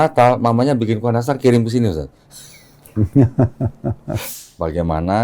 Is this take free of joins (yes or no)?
no